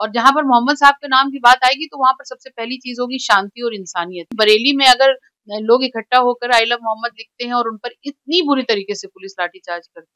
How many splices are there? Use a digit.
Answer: 1